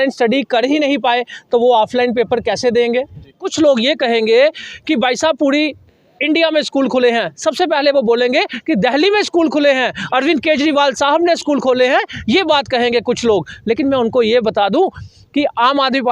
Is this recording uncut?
no; 1 cut; at 3.4 s

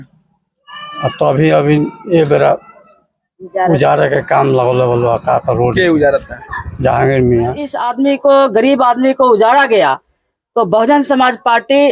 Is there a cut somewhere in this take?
yes; 1 cut; at 7.8 s

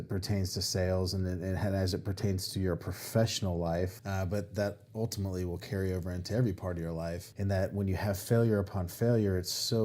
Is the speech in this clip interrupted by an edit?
yes; 2 cuts; at 4.0 s, 7.3 s

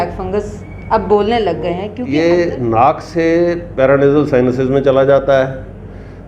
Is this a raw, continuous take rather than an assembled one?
no; 1 cut; at 1.9 s

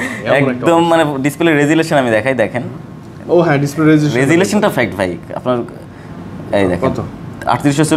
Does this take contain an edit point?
no; 0 cuts

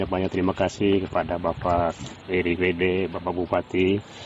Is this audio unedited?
yes; 0 cuts

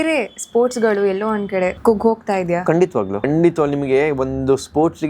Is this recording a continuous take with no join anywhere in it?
no; 2 cuts; at 1.8 s, 3.3 s

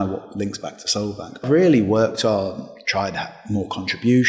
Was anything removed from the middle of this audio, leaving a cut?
yes; 1 cut; at 1.4 s

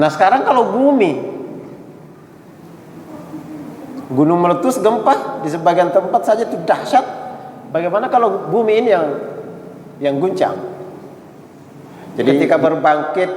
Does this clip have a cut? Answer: yes; 1 cut; at 12.4 s

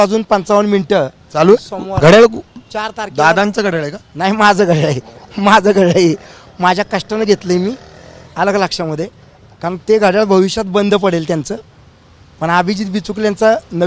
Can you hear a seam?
no; 0 cuts

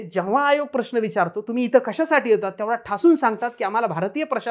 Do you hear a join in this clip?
no; 0 cuts

